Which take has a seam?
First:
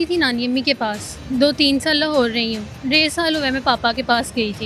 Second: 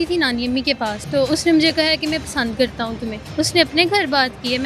second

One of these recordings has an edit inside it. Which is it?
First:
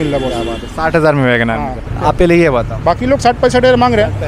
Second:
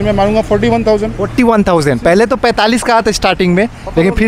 first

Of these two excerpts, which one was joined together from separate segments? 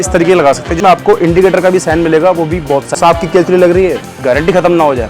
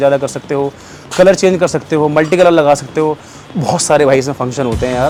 first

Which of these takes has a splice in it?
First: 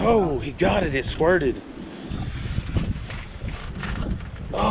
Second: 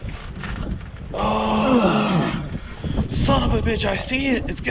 first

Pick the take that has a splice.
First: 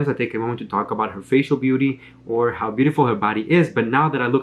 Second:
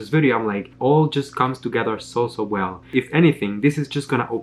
second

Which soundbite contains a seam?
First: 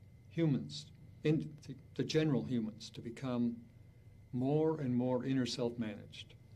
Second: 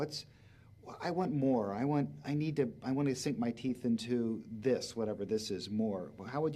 second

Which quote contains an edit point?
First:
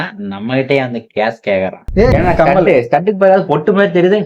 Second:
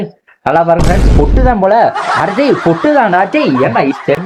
first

